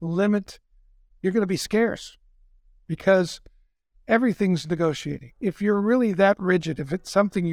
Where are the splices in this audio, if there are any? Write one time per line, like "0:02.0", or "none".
0:05.3